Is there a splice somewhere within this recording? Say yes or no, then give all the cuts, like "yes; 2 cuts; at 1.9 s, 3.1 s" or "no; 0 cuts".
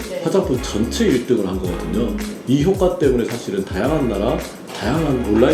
no; 0 cuts